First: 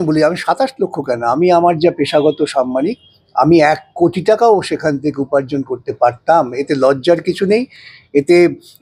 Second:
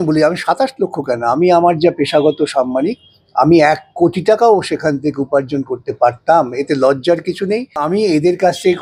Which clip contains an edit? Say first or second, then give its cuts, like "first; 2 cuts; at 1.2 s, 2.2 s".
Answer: second; 1 cut; at 7.8 s